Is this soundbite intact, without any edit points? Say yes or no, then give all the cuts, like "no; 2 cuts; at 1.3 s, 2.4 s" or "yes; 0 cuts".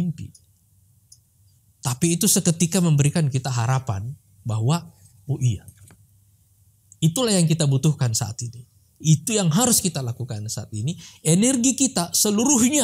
yes; 0 cuts